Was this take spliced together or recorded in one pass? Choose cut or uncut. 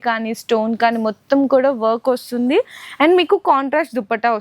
uncut